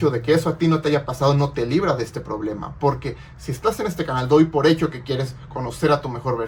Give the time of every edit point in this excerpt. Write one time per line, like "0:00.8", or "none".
none